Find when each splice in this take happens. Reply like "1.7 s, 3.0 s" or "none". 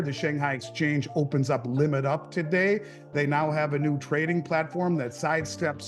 none